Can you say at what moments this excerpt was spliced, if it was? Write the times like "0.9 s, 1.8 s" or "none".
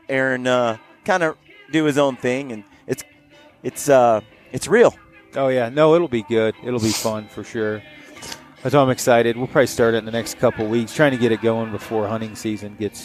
none